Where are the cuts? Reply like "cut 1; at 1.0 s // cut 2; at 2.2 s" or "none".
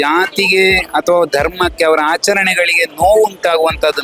none